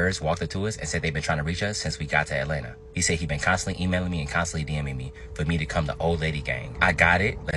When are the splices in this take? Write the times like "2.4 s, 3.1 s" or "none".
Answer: none